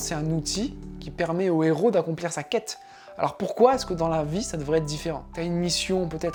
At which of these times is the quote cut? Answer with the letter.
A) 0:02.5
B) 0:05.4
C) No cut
C